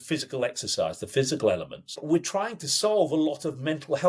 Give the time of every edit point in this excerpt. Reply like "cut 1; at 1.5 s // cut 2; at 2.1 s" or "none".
cut 1; at 1.9 s